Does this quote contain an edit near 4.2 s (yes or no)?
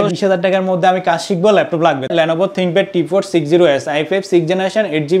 no